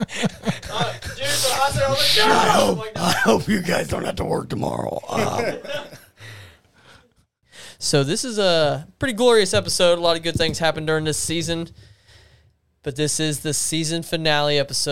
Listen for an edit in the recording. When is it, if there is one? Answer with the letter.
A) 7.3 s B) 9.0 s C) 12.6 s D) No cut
A